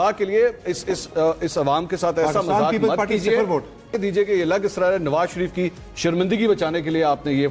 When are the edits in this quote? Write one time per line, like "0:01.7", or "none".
0:04.0